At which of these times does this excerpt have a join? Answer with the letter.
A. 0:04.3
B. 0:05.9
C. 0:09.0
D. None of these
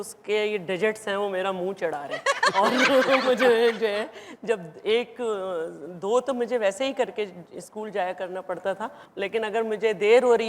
D